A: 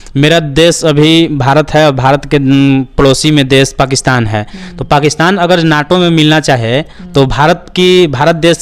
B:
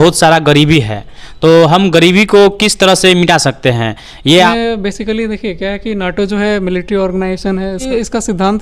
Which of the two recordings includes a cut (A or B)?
B